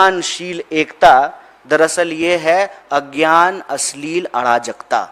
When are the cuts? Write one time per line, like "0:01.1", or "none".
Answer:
none